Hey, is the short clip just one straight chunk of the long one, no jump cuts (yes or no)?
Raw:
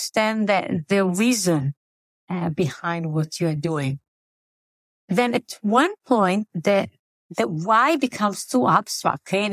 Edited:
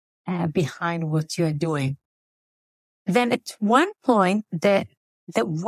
yes